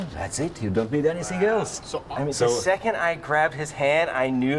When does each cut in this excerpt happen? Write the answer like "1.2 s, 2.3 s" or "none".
1.9 s